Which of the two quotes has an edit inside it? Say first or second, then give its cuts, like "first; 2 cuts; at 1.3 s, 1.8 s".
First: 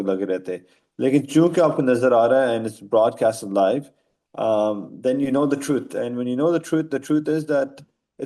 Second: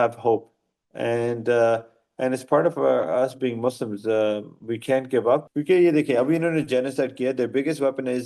second; 1 cut; at 5.5 s